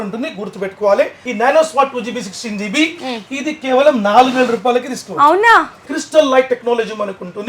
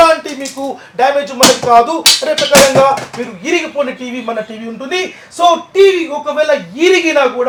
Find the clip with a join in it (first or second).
first